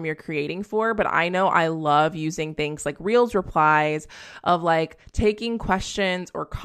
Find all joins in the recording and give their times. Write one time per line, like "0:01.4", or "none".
none